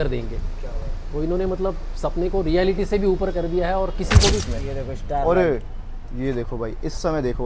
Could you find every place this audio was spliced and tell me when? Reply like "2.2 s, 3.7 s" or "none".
4.4 s

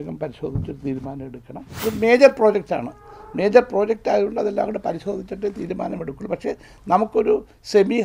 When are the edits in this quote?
1.8 s

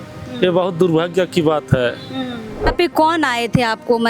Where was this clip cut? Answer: 2.7 s

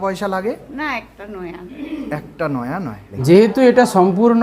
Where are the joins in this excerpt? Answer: 3.2 s

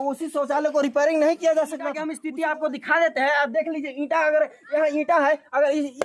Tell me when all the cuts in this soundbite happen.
2.2 s

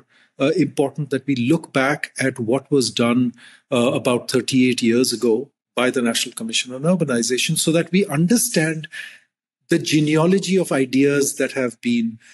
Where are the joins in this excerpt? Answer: none

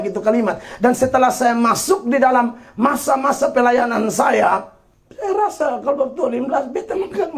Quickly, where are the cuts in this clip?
none

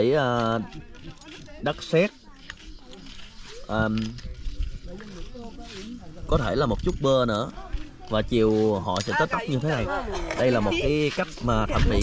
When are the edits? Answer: none

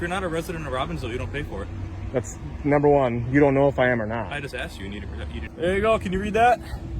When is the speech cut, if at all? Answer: 5.4 s

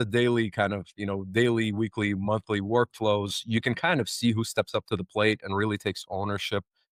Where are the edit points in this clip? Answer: none

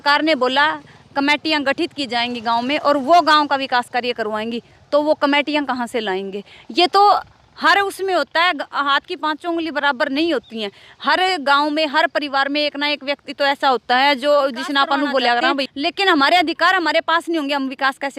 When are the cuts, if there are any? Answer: 15.7 s

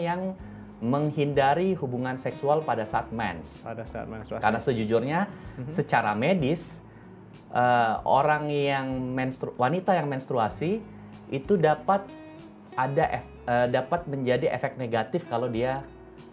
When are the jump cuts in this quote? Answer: none

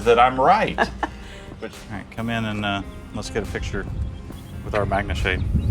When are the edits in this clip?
1.5 s

